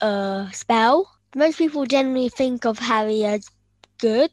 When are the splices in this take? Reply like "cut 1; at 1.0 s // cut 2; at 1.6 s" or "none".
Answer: cut 1; at 1.2 s